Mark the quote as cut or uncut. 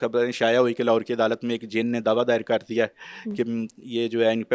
uncut